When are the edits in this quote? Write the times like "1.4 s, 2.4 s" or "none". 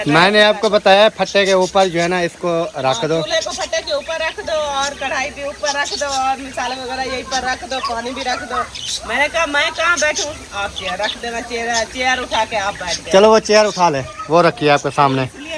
none